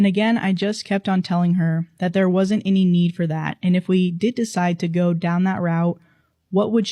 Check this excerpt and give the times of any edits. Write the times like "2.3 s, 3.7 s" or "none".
none